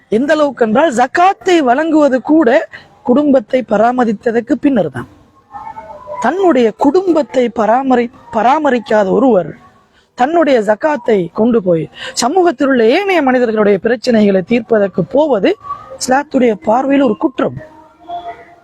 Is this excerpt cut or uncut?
uncut